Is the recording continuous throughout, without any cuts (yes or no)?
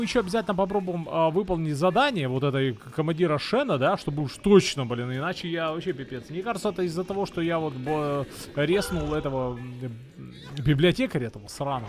yes